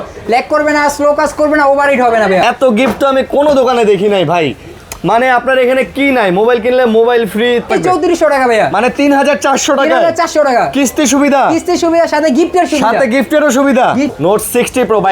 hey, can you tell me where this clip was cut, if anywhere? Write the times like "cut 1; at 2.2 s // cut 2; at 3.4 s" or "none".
cut 1; at 2.4 s // cut 2; at 7.7 s // cut 3; at 14.1 s